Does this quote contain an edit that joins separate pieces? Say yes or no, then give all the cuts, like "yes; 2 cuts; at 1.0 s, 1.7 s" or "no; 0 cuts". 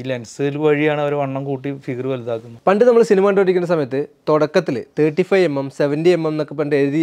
yes; 1 cut; at 2.5 s